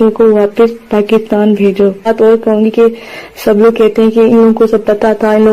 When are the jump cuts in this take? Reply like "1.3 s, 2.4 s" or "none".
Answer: 2.1 s